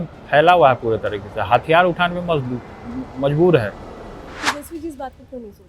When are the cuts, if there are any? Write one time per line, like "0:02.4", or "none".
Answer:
0:04.4

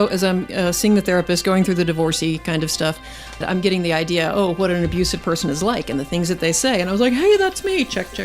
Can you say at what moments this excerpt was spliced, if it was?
0:03.4

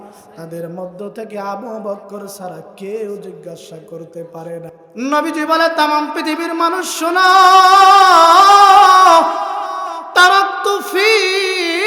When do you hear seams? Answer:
0:04.7

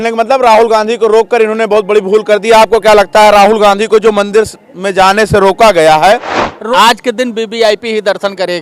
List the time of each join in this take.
0:06.3

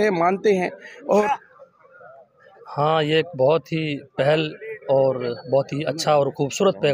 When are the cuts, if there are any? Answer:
0:01.0

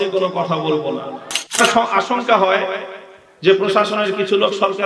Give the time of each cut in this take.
0:01.5

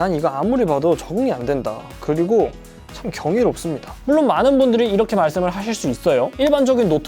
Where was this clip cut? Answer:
0:03.9

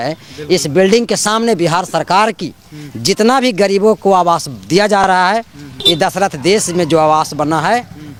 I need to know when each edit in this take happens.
none

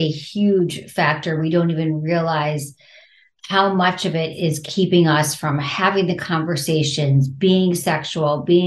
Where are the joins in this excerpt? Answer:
none

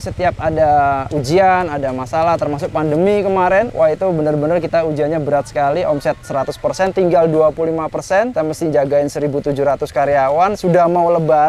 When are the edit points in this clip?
0:01.1
0:03.7
0:08.3

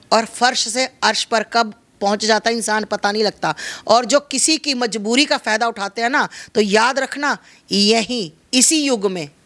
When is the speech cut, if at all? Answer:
none

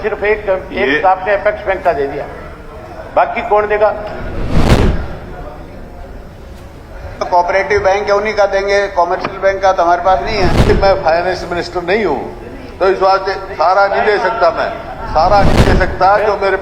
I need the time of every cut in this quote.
0:10.7

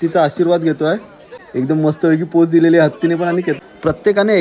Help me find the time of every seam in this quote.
0:01.4
0:03.6

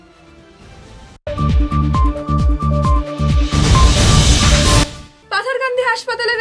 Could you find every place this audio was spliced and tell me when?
0:01.2
0:04.8

